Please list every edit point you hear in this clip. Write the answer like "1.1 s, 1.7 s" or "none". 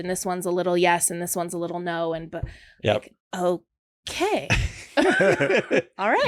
none